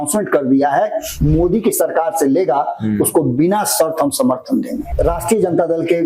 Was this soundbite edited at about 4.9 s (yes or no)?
yes